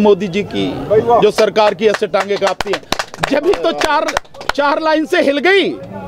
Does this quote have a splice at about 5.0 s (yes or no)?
no